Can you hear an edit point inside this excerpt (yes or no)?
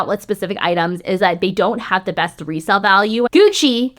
yes